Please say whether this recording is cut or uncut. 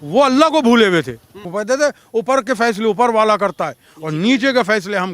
cut